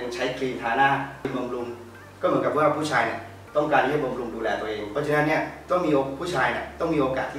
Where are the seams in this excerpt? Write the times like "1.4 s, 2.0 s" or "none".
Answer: 1.3 s, 4.8 s